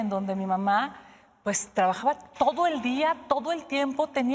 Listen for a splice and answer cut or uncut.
uncut